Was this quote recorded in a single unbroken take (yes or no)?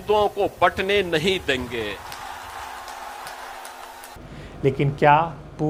yes